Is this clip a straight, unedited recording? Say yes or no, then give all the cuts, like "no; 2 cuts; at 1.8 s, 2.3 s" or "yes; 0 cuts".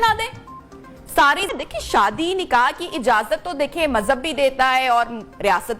no; 1 cut; at 1.5 s